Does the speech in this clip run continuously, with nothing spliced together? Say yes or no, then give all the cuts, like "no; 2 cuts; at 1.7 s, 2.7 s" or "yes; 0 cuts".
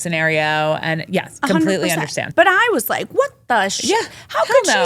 no; 1 cut; at 2.2 s